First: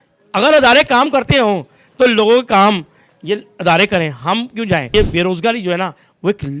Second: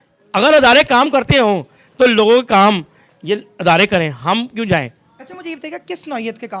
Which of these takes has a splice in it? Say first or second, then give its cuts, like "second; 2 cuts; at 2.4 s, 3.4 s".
first; 1 cut; at 4.9 s